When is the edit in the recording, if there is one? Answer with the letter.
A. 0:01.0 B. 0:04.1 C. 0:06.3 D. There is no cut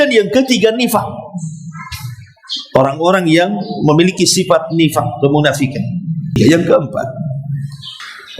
C